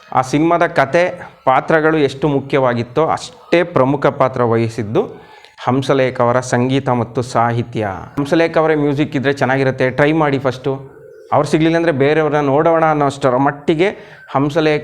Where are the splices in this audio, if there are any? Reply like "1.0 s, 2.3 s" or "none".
8.2 s